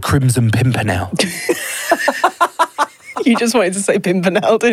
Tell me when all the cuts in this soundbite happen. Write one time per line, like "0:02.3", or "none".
0:01.1